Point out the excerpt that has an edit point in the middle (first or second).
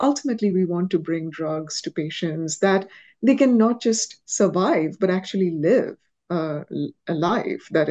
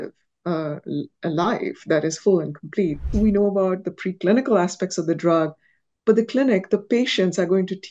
second